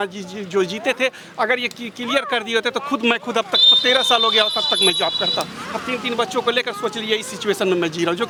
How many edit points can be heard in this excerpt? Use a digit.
0